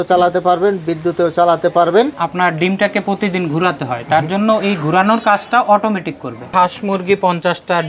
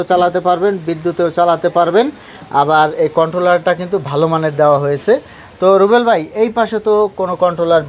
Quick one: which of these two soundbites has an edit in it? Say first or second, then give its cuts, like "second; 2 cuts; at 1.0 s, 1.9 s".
first; 2 cuts; at 2.2 s, 6.5 s